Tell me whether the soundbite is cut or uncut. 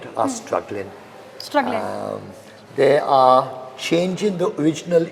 uncut